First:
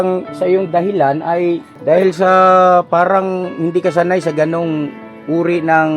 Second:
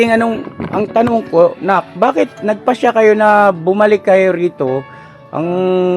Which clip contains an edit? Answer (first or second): first